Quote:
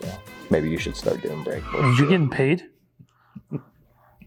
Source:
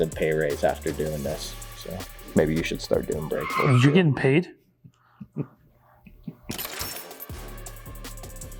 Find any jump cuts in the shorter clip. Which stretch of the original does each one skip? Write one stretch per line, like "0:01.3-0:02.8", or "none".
none